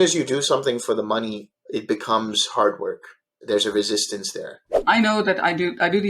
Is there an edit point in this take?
yes; 3 cuts; at 1.4 s, 3.3 s, 4.8 s

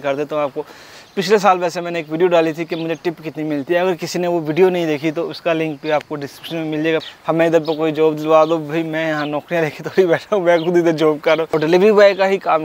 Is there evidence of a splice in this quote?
yes; 2 cuts; at 7.0 s, 11.5 s

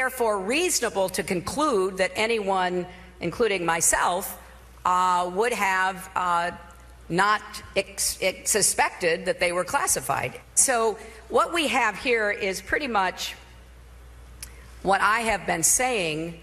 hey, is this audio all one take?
yes; 0 cuts

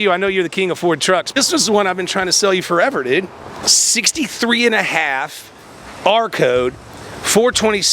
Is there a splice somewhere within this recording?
yes; 2 cuts; at 1.4 s, 3.6 s

